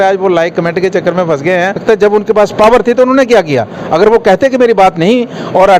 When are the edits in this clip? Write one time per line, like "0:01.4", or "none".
0:01.8